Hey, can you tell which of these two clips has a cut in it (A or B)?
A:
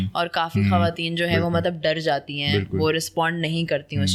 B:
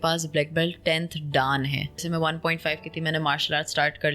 B